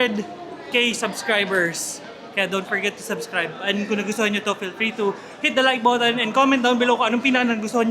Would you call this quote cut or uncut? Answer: uncut